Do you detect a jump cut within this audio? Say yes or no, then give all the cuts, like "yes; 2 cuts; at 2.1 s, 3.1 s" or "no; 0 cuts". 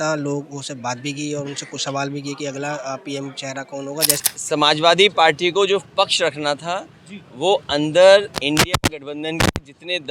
yes; 1 cut; at 4.2 s